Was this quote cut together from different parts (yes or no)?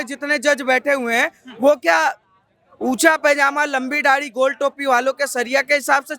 no